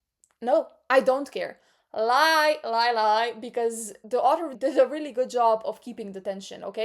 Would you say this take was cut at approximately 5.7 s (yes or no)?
no